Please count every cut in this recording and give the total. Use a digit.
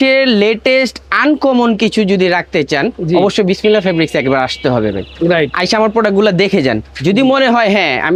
0